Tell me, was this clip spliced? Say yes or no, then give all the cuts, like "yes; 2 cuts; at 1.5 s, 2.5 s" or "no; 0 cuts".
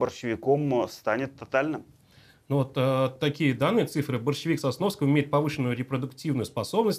no; 0 cuts